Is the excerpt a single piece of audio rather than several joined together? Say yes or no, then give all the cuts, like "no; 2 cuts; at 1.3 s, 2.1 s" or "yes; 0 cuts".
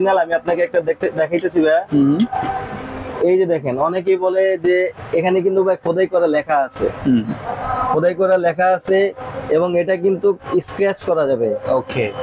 yes; 0 cuts